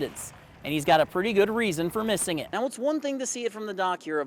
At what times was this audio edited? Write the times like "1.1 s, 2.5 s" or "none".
2.5 s